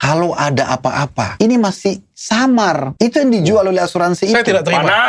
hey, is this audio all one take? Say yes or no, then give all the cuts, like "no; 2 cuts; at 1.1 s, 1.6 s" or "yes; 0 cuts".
no; 2 cuts; at 1.3 s, 2.9 s